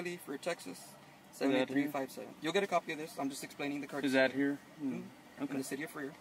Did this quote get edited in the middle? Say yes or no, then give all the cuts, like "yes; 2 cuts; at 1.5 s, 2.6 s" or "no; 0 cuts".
no; 0 cuts